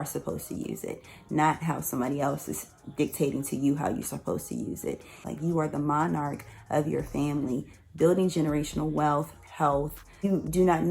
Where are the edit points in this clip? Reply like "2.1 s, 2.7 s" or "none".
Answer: 5.2 s, 10.2 s